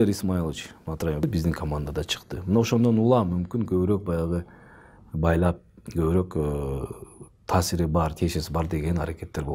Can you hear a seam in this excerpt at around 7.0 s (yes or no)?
no